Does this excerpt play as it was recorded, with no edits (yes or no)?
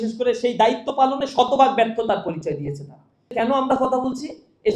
no